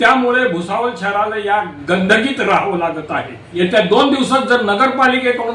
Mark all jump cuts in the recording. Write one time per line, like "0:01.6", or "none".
0:03.4